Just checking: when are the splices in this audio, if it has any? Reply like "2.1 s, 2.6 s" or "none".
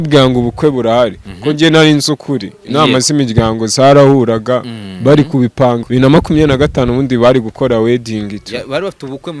5.8 s